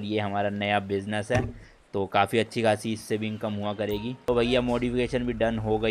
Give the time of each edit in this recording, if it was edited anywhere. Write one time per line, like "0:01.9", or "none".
0:04.3